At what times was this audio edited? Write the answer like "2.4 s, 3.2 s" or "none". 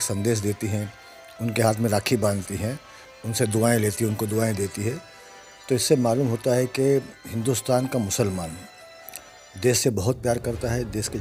none